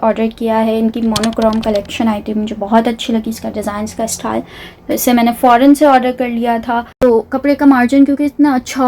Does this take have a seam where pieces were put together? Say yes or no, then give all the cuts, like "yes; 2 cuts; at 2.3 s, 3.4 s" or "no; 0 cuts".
yes; 1 cut; at 6.9 s